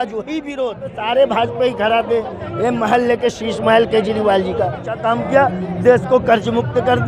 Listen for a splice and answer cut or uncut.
cut